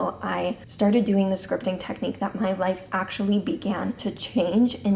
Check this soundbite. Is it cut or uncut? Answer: cut